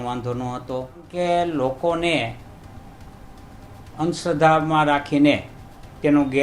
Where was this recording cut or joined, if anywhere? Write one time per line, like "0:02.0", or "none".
0:01.1